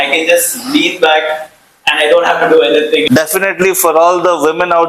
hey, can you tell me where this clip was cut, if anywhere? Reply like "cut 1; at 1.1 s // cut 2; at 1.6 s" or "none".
cut 1; at 3.1 s

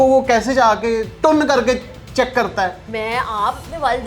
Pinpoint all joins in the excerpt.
cut 1; at 1.1 s // cut 2; at 2.8 s

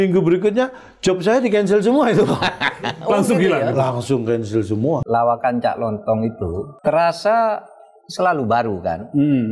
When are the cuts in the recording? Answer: cut 1; at 5.0 s // cut 2; at 6.7 s

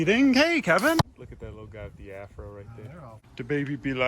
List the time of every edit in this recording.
cut 1; at 1.0 s // cut 2; at 3.3 s

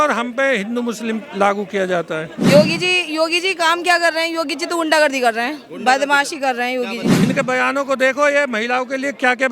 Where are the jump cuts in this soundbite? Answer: cut 1; at 2.3 s // cut 2; at 7.1 s

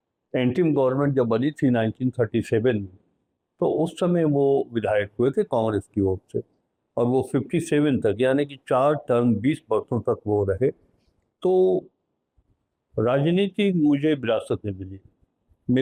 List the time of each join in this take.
none

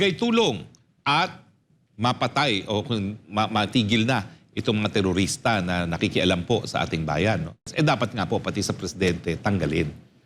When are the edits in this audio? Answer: cut 1; at 7.7 s

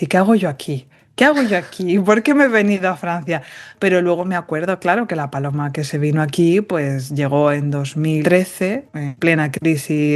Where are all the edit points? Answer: cut 1; at 8.2 s // cut 2; at 9.0 s

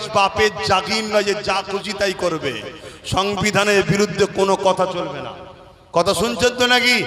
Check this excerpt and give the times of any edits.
none

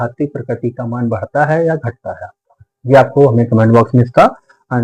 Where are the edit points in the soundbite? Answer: none

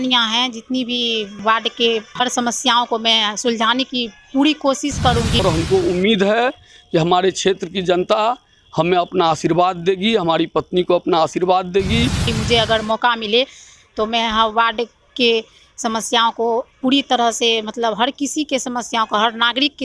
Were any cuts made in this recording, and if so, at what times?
cut 1; at 1.3 s // cut 2; at 2.1 s // cut 3; at 5.4 s // cut 4; at 12.2 s

